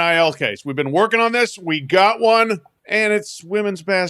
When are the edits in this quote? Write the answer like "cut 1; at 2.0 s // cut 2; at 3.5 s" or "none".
cut 1; at 2.7 s